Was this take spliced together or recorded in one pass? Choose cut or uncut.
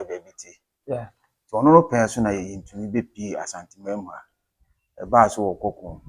uncut